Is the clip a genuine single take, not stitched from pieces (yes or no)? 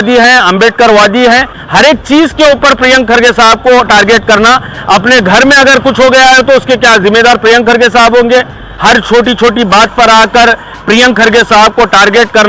no